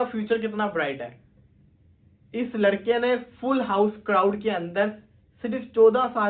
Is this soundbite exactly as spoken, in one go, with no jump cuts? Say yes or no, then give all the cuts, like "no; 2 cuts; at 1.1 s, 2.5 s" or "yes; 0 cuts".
yes; 0 cuts